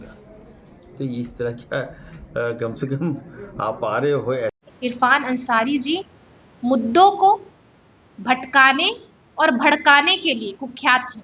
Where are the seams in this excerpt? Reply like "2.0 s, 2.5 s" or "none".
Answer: 4.6 s